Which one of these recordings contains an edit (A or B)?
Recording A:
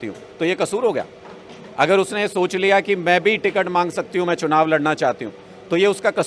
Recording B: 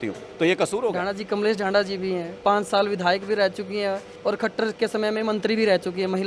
B